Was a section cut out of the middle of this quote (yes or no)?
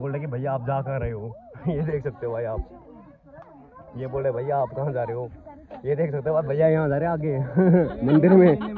no